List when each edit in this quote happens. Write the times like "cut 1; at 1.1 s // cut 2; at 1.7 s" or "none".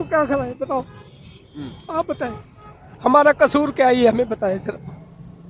cut 1; at 2.8 s